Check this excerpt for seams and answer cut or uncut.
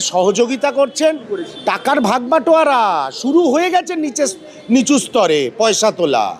cut